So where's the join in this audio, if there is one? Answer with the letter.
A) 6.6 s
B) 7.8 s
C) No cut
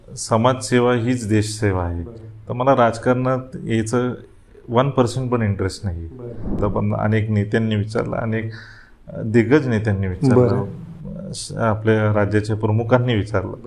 A